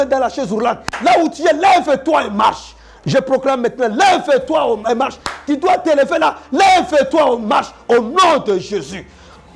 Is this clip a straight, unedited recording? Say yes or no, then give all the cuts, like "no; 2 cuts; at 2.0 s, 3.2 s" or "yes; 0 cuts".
yes; 0 cuts